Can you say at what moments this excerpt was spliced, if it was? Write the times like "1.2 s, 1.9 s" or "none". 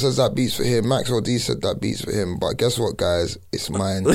none